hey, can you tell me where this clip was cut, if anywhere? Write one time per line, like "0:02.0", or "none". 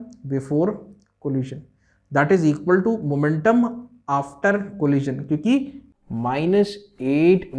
0:05.8